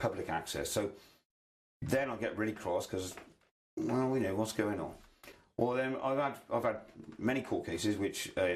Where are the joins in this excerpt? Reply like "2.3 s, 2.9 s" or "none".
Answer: none